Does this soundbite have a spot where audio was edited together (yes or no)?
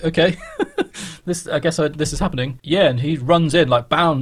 yes